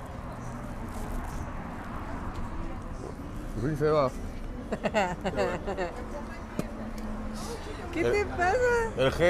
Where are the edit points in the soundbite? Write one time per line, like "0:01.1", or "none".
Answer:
none